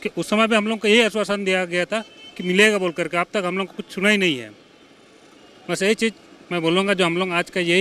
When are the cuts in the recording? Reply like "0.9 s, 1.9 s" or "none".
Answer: none